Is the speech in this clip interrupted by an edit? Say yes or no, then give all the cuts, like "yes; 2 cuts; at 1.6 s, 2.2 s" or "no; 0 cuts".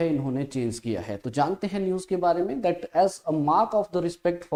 no; 0 cuts